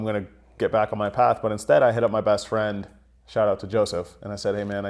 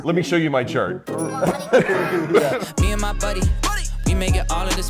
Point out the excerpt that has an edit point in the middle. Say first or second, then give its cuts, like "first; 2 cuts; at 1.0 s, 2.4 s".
second; 1 cut; at 2.7 s